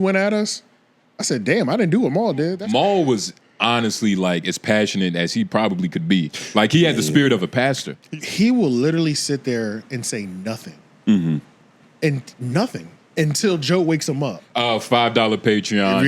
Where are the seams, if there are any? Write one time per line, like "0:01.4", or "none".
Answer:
0:02.6
0:07.9
0:14.4